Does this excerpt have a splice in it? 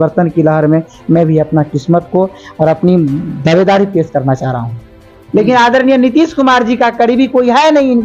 yes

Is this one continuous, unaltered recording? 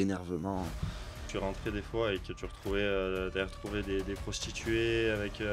no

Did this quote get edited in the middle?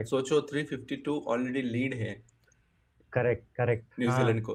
no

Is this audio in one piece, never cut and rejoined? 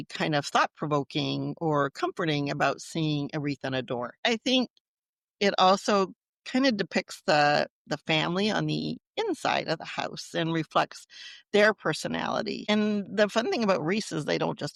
yes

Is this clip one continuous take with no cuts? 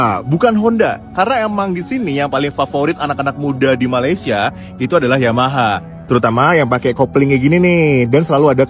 yes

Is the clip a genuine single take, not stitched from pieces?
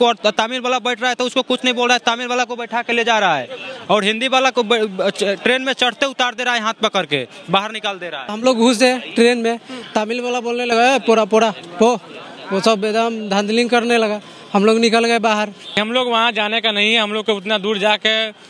no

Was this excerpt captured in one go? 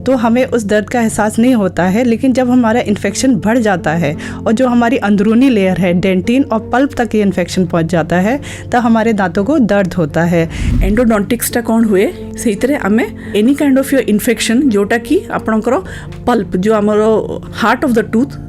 no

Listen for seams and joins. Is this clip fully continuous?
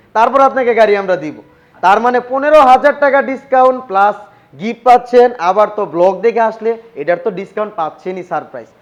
yes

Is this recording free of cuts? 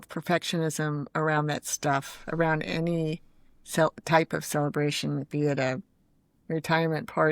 yes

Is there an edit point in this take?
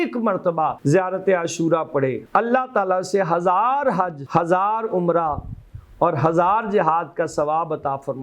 yes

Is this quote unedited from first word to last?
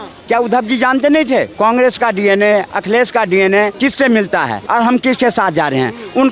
no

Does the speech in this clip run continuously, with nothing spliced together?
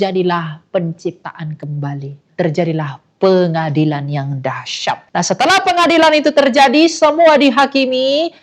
no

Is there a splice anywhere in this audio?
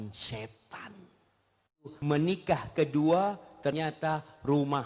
yes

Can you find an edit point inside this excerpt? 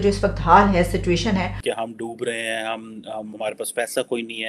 yes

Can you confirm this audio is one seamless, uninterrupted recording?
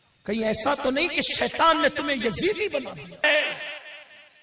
no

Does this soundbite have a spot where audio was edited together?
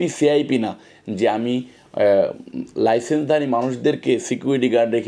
no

